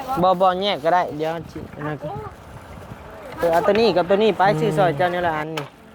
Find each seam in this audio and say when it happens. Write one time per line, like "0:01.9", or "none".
0:03.4